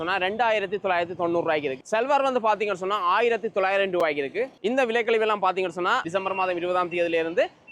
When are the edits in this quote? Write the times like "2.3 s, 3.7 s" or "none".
1.7 s, 4.6 s, 6.1 s